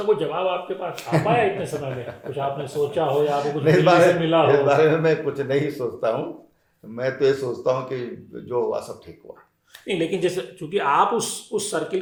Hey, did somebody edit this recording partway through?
no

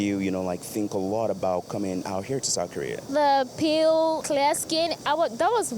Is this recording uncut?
no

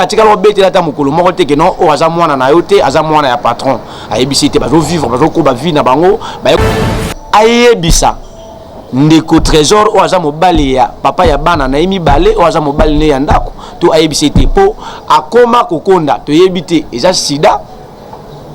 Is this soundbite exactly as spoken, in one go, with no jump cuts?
no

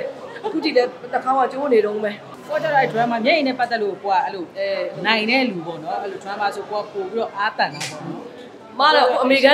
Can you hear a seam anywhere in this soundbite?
yes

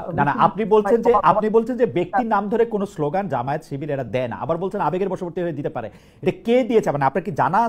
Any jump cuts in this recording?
no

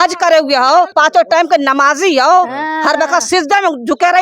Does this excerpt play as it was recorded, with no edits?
no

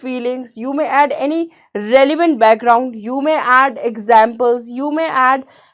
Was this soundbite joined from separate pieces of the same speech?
no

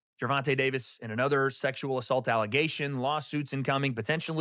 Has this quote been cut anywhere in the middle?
no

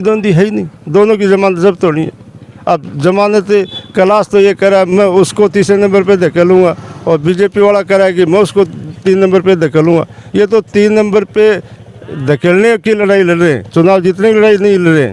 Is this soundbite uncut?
yes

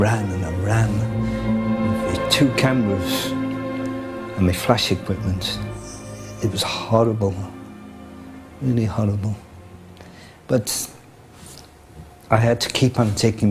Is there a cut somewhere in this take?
no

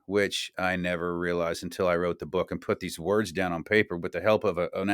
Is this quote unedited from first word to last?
yes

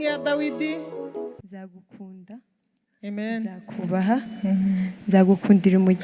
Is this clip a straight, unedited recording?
no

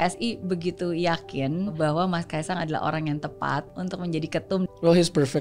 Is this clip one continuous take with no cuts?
no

